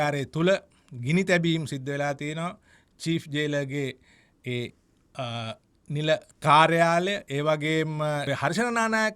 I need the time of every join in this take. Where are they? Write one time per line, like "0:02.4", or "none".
0:08.2